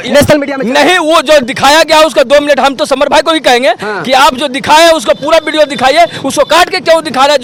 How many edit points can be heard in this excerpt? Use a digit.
0